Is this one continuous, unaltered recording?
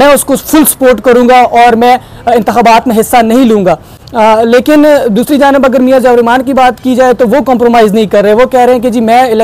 yes; 0 cuts

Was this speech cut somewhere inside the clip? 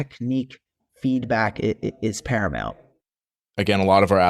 yes; 1 cut; at 3.1 s

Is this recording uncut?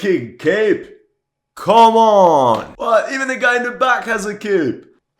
yes; 0 cuts

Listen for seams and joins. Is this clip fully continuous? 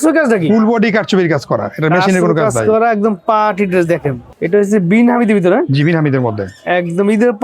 no; 1 cut; at 4.3 s

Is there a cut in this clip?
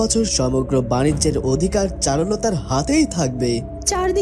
no; 0 cuts

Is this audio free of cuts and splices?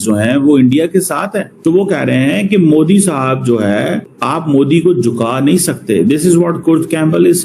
no; 2 cuts; at 1.5 s, 4.1 s

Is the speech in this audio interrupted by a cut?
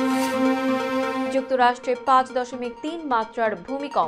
no; 0 cuts

